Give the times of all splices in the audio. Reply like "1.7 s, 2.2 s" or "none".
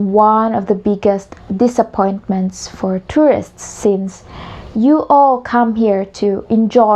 none

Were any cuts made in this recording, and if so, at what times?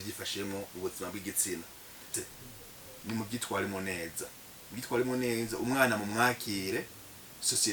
2.0 s

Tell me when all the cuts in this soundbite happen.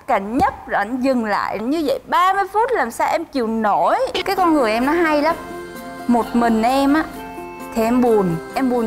4.2 s

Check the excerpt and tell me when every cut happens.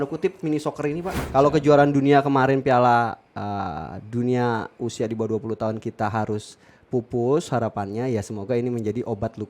1.1 s

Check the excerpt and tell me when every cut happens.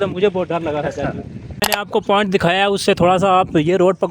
1.7 s

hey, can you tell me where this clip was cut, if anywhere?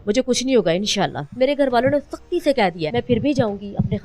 1.2 s, 2.8 s

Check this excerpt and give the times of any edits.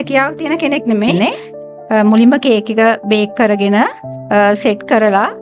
1.1 s

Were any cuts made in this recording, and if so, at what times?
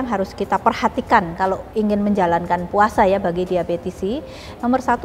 1.6 s

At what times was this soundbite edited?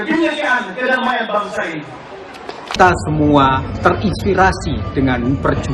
2.7 s

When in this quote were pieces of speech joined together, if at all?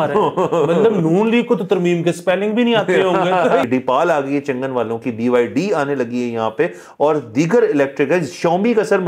3.7 s

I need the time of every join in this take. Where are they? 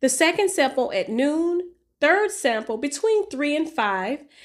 none

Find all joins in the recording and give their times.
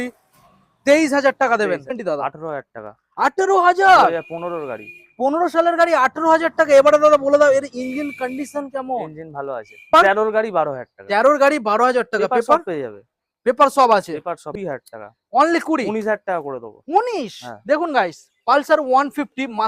2.0 s, 9.9 s, 14.5 s

